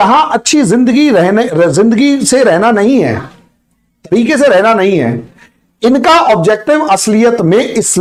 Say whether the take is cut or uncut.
uncut